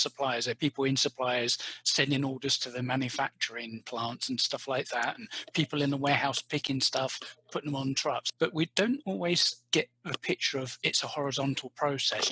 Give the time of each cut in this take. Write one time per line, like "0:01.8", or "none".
0:08.3